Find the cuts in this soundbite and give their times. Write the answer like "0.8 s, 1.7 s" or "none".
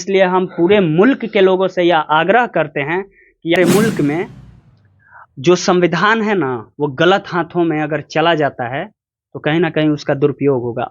3.6 s